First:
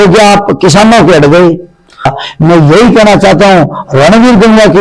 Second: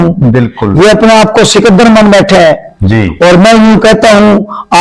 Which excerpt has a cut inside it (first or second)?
first